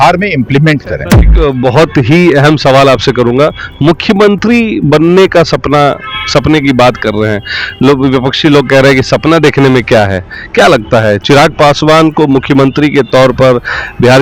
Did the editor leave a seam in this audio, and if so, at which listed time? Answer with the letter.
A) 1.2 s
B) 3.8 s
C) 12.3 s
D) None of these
A